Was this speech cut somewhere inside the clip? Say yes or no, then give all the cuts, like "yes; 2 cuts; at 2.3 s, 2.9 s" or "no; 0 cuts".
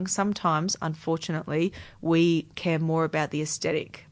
no; 0 cuts